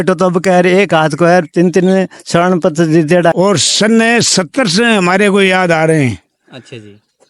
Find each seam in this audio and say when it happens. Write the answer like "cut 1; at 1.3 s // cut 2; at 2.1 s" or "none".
cut 1; at 3.3 s